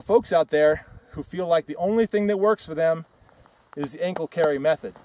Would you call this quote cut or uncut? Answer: uncut